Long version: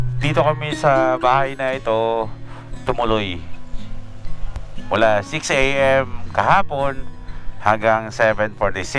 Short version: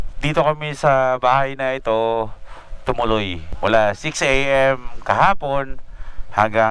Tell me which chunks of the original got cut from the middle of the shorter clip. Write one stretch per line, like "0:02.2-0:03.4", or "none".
0:03.4-0:04.7